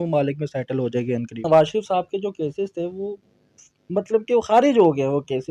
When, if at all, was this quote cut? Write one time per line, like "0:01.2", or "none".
0:01.4